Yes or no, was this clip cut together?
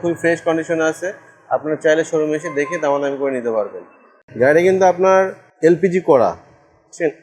yes